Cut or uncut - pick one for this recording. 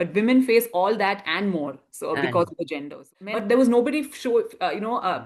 cut